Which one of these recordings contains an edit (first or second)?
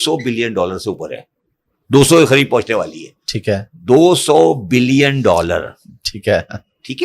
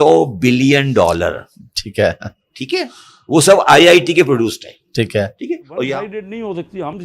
second